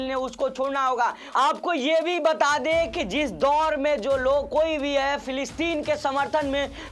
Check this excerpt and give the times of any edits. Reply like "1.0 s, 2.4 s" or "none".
1.2 s